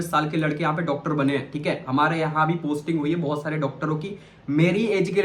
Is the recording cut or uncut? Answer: uncut